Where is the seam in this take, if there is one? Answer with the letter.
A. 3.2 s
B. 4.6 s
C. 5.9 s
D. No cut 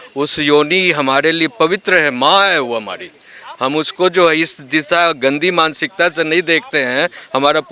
D